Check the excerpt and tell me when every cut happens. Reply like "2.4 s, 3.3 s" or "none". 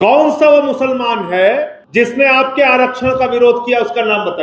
1.8 s